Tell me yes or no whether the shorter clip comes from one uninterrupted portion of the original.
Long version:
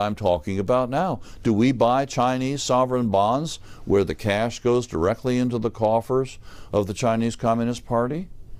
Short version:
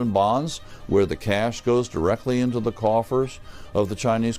yes